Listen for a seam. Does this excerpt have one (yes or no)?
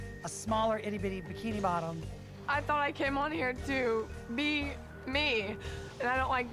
no